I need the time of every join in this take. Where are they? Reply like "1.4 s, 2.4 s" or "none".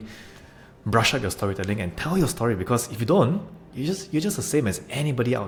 none